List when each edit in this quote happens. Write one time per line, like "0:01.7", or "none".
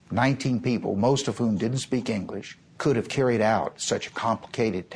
0:02.8